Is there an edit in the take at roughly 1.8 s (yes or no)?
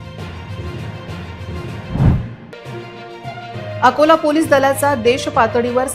yes